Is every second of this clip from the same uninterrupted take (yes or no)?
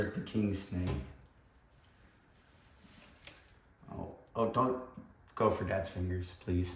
yes